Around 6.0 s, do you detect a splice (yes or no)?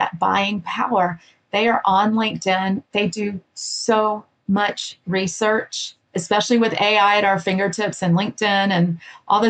yes